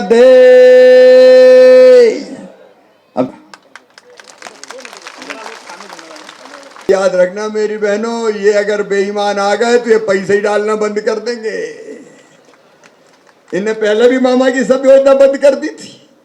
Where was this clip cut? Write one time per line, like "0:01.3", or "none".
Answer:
0:03.3
0:06.9